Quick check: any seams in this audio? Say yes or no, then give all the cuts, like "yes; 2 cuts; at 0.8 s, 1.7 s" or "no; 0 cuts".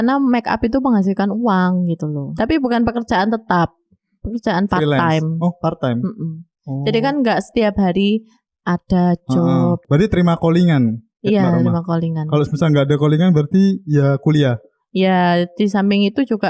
yes; 2 cuts; at 2.3 s, 9.8 s